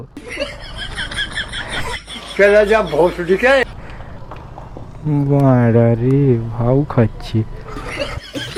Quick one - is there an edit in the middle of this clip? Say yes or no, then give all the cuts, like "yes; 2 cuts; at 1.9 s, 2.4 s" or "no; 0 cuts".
no; 0 cuts